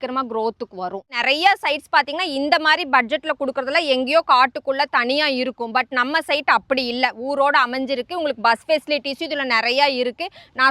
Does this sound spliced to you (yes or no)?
yes